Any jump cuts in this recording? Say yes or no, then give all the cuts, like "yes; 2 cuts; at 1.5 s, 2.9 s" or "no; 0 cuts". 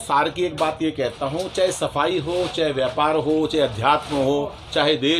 no; 0 cuts